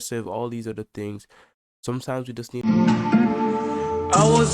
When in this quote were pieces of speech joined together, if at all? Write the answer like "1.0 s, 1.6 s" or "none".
2.6 s